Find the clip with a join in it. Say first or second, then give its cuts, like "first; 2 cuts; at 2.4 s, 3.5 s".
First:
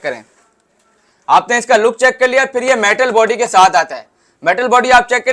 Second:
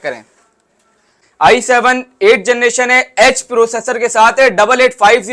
second; 1 cut; at 1.1 s